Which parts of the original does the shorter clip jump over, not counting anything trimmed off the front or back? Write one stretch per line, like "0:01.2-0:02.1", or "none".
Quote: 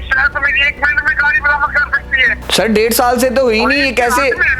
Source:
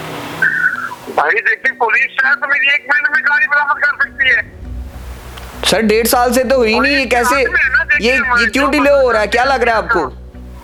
0:04.5-0:05.5

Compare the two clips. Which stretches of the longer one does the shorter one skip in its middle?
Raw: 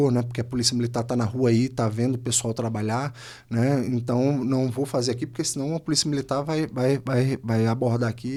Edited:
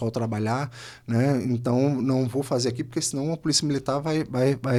none

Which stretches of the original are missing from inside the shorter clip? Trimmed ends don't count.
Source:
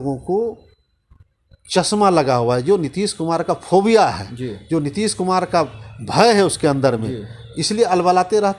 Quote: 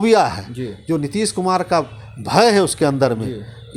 none

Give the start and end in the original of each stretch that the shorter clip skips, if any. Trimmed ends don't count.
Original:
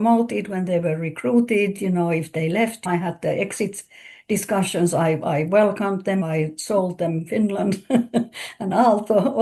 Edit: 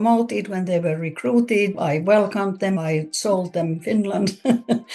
0:01.8-0:05.2

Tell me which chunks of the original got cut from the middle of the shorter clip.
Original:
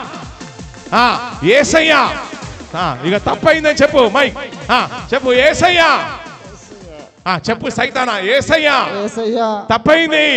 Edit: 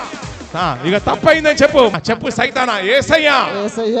0:04.1-0:07.3

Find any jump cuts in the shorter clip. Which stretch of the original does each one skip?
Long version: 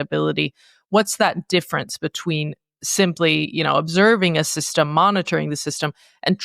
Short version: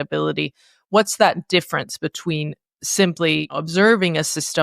0:03.5-0:03.7

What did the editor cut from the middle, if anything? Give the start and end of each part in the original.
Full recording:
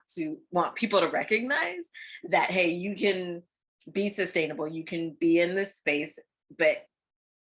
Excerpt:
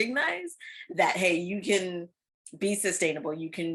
none

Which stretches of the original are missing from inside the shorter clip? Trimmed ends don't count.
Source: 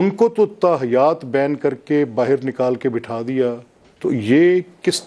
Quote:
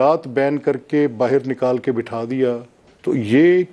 none

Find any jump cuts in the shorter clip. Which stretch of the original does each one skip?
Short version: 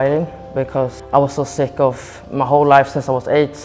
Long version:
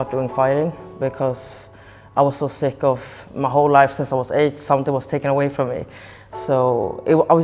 0:01.4-0:02.0

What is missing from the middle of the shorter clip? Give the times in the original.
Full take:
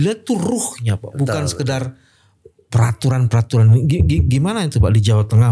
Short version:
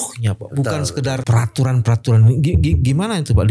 0:01.9-0:02.7

